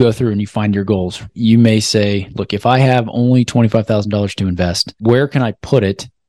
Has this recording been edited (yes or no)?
yes